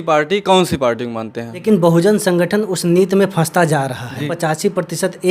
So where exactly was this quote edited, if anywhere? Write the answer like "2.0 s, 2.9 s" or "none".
1.6 s, 4.3 s